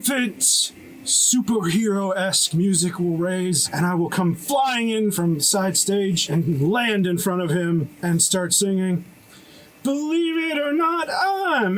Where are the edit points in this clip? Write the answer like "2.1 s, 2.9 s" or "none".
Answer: 3.7 s, 5.1 s, 6.2 s, 7.9 s